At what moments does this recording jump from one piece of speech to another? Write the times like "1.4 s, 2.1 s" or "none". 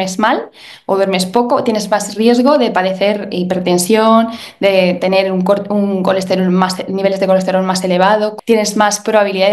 8.3 s